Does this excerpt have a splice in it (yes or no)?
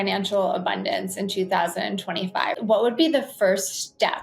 yes